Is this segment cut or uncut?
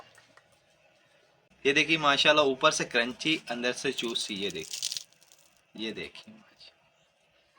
cut